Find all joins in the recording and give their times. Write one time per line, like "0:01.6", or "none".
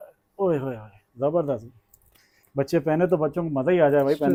none